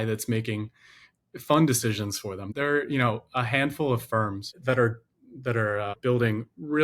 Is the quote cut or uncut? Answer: cut